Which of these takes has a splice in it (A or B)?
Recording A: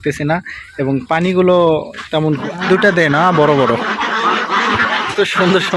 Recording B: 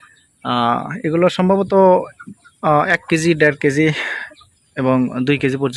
A